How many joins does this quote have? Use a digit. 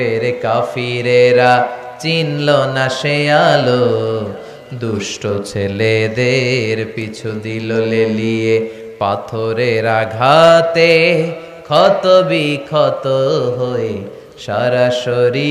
0